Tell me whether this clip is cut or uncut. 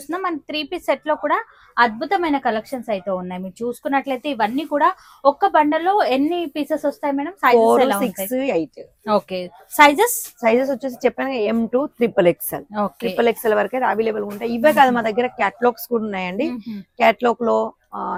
uncut